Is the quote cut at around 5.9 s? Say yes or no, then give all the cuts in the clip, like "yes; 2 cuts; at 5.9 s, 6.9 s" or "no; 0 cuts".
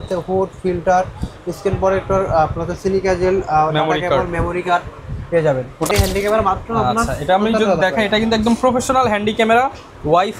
yes; 1 cut; at 5.9 s